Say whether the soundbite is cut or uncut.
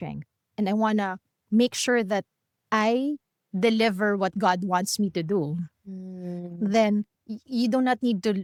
uncut